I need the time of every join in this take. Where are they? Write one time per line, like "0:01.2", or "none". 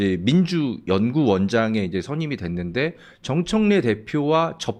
none